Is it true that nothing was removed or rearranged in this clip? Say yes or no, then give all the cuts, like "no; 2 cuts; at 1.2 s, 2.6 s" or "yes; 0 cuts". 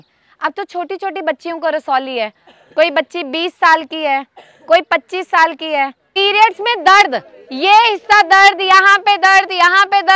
no; 1 cut; at 6.2 s